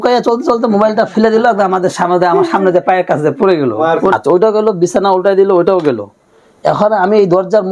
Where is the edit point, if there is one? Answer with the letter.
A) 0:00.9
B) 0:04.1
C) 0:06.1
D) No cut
B